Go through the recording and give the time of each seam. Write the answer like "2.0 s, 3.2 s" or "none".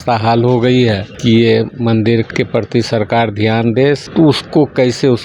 1.1 s, 2.3 s, 4.0 s

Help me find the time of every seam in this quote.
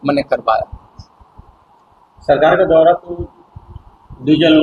none

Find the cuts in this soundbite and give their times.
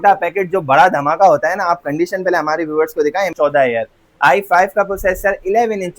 3.3 s

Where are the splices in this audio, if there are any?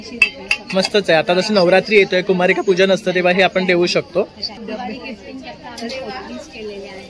4.5 s

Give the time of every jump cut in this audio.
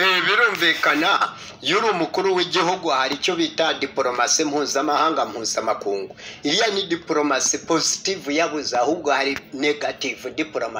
none

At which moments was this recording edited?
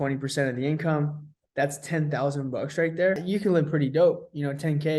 3.2 s

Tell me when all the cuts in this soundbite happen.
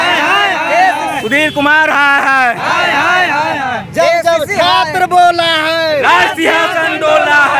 none

